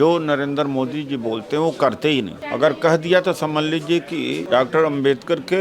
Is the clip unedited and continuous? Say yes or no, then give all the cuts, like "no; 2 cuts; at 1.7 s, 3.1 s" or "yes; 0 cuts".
no; 2 cuts; at 2.4 s, 4.4 s